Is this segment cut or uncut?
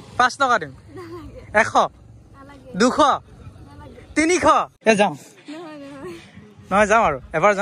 cut